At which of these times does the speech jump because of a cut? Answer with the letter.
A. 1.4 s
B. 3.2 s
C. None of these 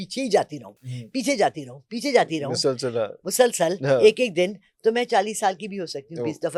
C